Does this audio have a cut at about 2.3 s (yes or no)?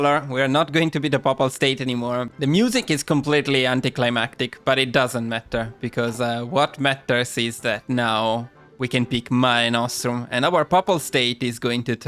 yes